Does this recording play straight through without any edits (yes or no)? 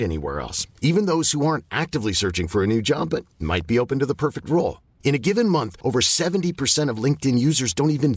yes